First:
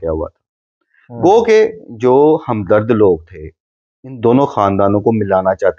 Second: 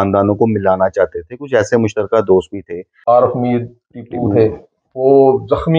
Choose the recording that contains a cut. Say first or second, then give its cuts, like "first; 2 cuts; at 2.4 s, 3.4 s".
second; 1 cut; at 2.9 s